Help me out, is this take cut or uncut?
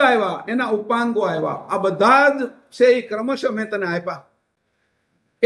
uncut